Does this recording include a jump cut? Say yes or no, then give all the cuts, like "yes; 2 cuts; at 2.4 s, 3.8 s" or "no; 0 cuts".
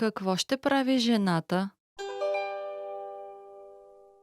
yes; 1 cut; at 1.8 s